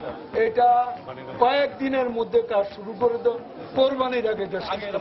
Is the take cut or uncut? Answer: uncut